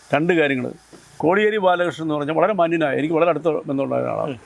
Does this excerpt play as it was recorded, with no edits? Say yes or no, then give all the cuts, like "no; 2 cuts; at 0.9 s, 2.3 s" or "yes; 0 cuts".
no; 1 cut; at 1.0 s